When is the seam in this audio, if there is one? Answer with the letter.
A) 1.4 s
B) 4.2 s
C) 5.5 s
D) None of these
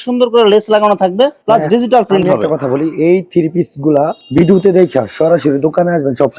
D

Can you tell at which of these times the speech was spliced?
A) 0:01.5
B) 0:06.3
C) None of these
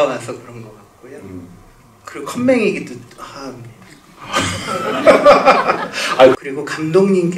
B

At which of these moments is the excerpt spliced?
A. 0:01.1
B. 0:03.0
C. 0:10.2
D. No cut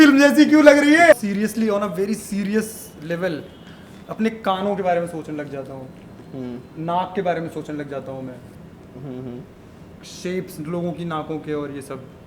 A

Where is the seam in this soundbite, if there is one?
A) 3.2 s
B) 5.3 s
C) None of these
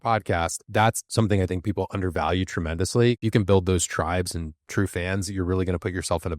A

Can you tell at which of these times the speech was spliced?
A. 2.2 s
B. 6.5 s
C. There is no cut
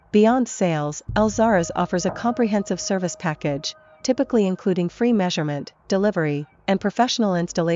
C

